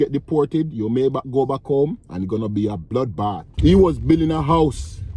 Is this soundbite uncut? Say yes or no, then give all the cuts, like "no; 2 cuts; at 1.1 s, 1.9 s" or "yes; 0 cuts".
no; 1 cut; at 3.5 s